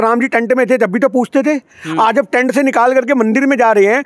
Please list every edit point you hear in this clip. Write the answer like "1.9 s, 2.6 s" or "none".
none